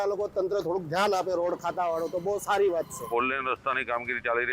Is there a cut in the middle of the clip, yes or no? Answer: yes